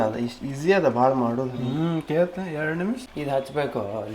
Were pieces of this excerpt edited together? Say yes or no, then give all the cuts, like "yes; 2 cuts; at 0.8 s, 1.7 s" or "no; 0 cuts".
yes; 1 cut; at 3.0 s